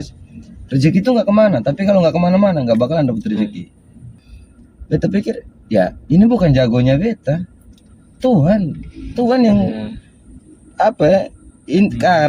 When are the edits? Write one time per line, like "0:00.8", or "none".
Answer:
0:04.2